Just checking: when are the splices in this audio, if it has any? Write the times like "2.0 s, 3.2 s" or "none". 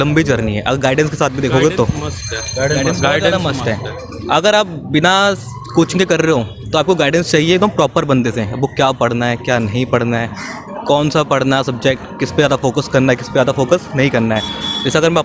none